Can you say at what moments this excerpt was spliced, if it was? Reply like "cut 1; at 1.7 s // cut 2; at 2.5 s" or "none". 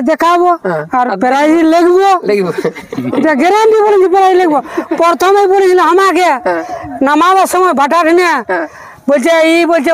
none

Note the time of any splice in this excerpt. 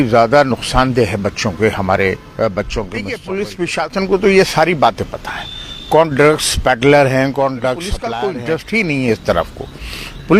cut 1; at 3.2 s // cut 2; at 8.0 s

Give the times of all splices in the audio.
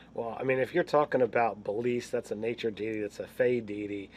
cut 1; at 3.0 s

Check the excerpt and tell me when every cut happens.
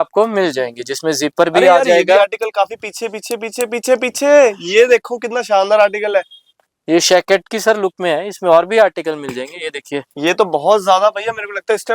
none

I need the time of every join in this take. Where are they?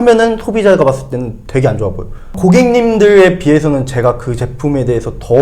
cut 1; at 2.2 s

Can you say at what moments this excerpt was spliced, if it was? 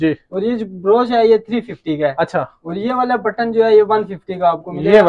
none

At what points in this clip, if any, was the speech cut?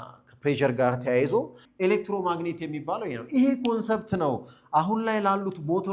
cut 1; at 1.6 s

